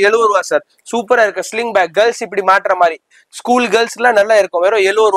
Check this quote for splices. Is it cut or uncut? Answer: uncut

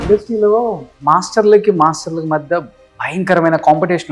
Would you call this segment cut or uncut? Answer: uncut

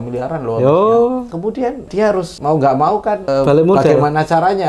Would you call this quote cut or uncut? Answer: cut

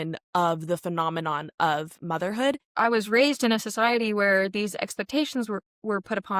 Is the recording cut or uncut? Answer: cut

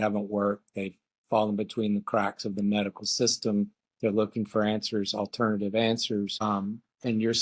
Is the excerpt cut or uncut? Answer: cut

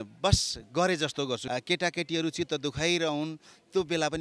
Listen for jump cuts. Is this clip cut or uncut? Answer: cut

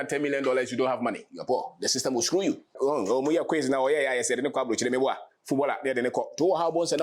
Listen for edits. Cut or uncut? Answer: cut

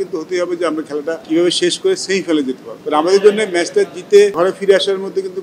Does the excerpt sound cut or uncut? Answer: cut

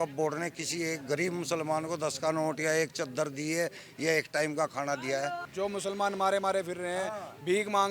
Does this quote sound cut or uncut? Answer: cut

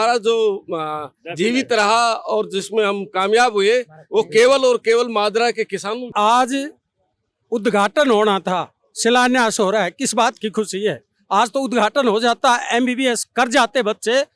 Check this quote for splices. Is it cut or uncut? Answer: cut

